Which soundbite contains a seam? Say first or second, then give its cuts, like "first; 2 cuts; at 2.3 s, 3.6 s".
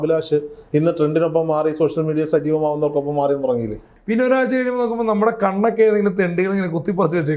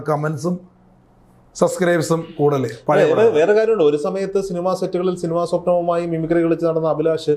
first; 1 cut; at 3.9 s